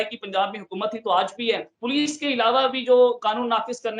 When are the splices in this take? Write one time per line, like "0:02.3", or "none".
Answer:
0:01.7